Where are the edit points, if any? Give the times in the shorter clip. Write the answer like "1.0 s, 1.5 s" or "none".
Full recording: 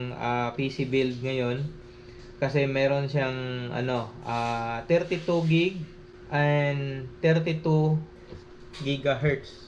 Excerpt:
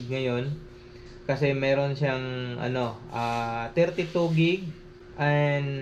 none